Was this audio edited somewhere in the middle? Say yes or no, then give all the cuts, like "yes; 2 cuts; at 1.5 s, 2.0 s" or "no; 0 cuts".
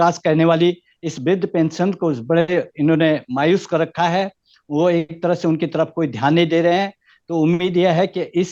no; 0 cuts